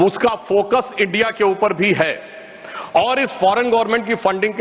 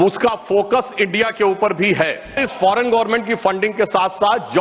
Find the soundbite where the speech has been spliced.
second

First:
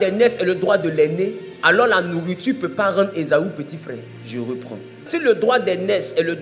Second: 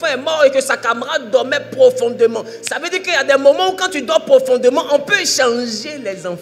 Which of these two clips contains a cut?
first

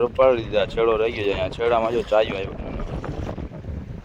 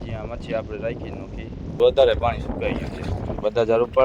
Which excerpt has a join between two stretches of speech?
second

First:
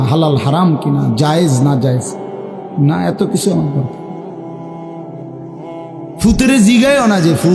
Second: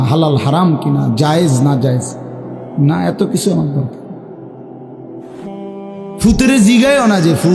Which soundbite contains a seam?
first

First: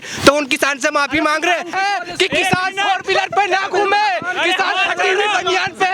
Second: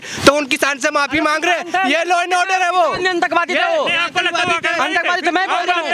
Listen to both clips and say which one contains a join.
first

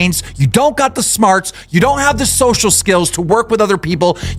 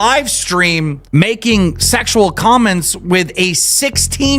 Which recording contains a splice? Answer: second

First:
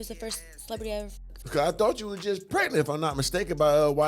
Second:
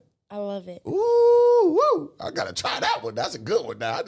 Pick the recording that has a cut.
first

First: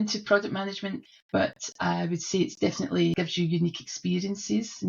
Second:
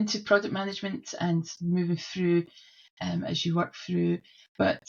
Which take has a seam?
first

